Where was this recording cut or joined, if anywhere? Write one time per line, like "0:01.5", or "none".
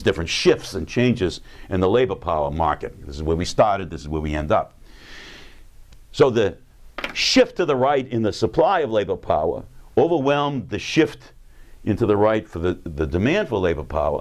0:07.2